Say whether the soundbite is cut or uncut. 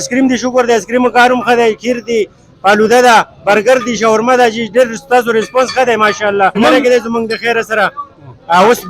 cut